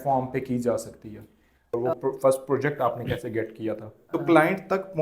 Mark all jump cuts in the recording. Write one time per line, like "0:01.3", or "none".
0:01.8
0:03.9